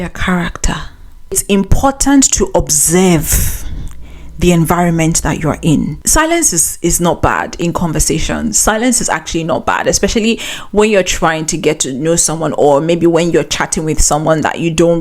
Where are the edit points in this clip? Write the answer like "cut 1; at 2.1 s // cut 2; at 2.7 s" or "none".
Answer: cut 1; at 1.4 s // cut 2; at 6.0 s